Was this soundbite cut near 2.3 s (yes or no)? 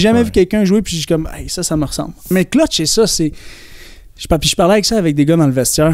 yes